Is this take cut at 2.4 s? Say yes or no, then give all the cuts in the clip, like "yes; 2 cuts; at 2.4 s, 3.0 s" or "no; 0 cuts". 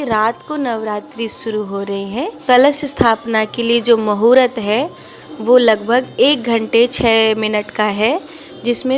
yes; 1 cut; at 2.4 s